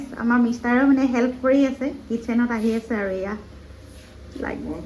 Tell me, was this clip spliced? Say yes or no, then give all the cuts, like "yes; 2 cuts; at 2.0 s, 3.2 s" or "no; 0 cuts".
no; 0 cuts